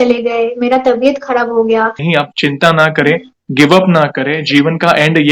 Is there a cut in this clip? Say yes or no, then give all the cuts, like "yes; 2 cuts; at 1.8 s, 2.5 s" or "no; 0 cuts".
yes; 1 cut; at 2.0 s